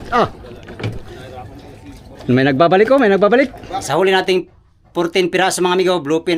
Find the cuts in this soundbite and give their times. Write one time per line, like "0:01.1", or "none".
0:03.7